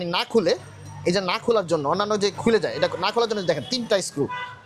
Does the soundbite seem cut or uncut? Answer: uncut